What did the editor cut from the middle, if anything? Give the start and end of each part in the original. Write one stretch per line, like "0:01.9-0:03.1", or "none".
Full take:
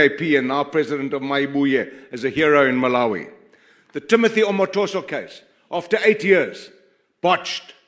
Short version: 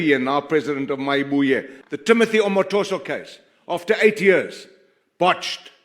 0:02.0-0:03.8